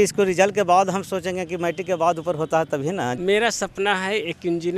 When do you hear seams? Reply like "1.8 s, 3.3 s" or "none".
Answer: 3.2 s

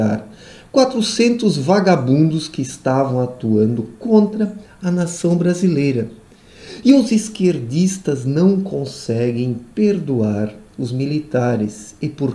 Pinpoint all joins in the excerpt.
4.6 s

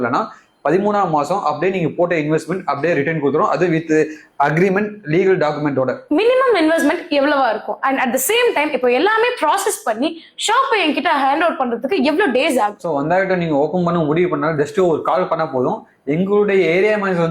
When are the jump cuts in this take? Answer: 6.0 s

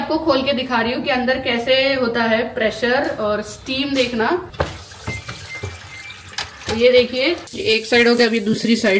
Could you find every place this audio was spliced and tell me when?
4.5 s, 7.5 s

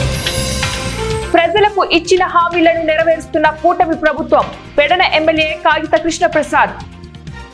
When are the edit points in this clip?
none

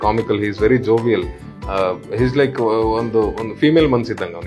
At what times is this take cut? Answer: none

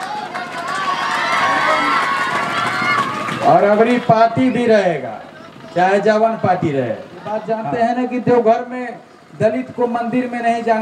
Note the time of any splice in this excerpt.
7.3 s

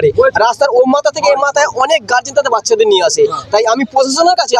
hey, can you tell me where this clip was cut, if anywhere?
none

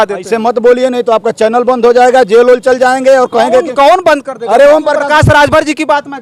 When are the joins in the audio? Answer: none

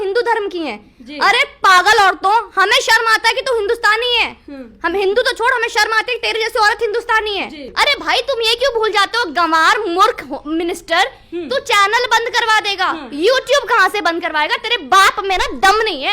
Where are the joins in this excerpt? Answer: 7.6 s

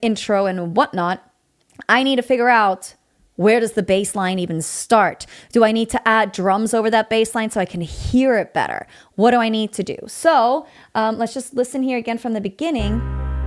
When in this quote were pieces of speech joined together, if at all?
none

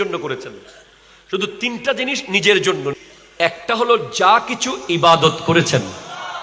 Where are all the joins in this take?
2.9 s

